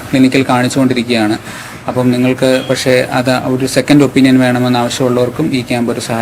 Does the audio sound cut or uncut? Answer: uncut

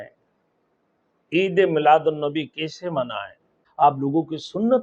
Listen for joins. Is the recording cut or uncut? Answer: cut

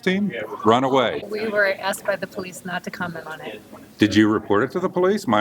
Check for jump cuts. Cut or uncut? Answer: cut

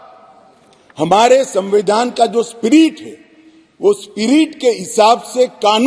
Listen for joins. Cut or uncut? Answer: uncut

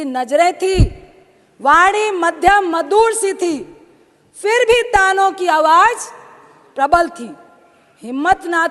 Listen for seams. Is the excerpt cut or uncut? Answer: uncut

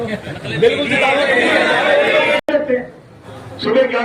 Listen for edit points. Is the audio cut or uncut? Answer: cut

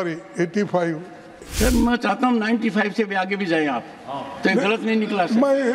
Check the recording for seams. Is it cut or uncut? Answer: cut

